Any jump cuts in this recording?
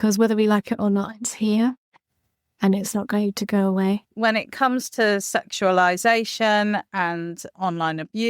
yes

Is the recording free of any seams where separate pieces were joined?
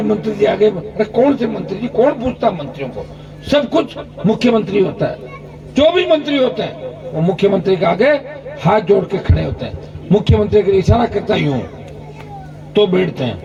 yes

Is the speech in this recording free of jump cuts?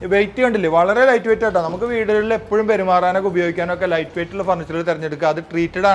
yes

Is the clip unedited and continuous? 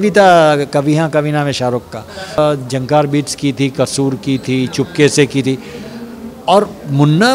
no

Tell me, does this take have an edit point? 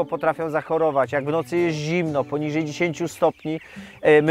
no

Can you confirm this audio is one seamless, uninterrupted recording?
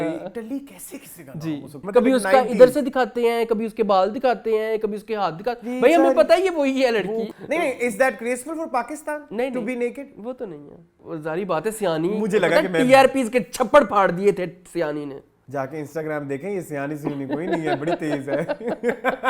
no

